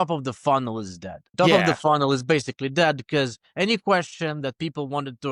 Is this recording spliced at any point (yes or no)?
no